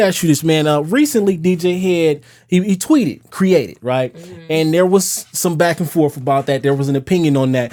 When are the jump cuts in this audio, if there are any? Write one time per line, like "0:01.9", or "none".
none